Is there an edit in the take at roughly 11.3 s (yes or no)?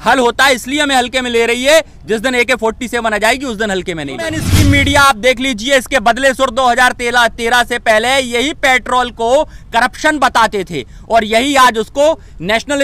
no